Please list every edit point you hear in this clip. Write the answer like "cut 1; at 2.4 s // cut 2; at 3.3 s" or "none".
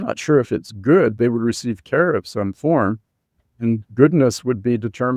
none